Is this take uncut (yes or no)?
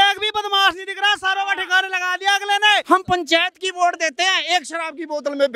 no